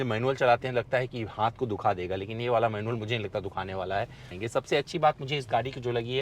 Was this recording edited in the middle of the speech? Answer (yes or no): yes